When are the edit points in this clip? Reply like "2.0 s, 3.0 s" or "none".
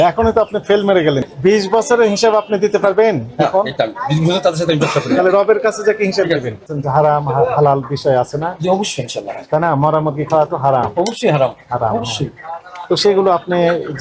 1.2 s, 6.7 s